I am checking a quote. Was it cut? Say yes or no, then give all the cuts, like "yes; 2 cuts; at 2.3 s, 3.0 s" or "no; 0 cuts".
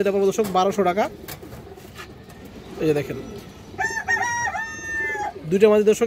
no; 0 cuts